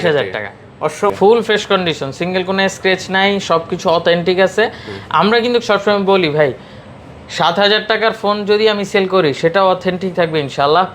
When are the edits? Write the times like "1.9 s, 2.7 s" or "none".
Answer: 1.1 s

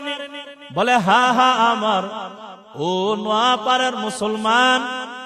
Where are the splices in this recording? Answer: none

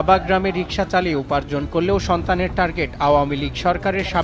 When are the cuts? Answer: none

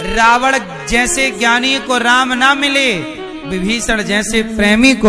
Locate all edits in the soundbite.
none

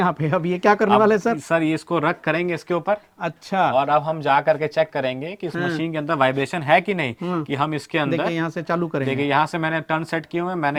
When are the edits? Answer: none

